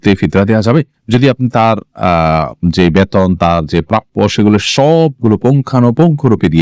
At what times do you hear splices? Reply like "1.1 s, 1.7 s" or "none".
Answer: none